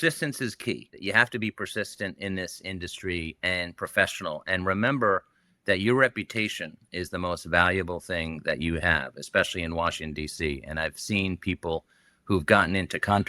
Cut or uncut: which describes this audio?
cut